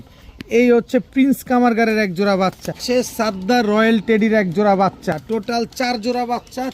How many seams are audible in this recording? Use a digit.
2